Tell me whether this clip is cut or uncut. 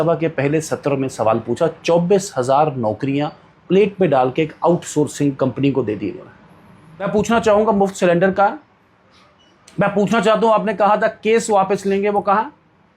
cut